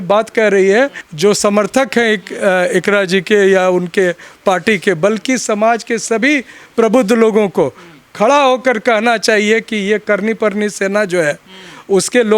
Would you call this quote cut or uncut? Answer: cut